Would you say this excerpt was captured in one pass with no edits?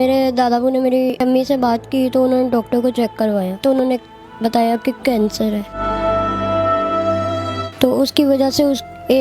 no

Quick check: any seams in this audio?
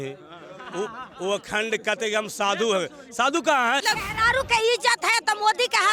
yes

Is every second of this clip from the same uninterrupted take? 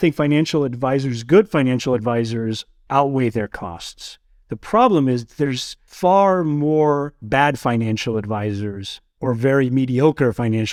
yes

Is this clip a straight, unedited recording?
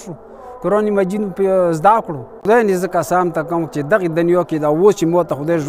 no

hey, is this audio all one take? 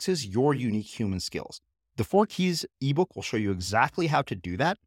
yes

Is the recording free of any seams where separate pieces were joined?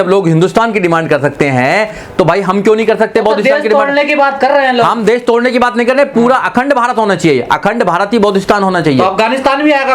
yes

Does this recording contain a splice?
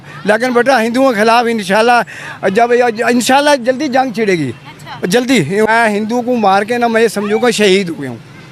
yes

